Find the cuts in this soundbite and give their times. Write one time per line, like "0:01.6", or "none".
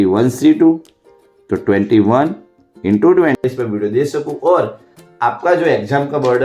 0:03.4